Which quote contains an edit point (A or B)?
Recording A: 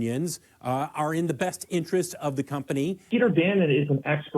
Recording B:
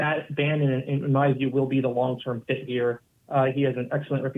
A